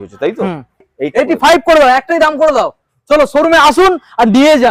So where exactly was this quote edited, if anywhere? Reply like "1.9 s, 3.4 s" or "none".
0.9 s